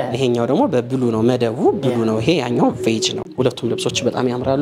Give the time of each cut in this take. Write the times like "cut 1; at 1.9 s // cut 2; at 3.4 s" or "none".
cut 1; at 3.3 s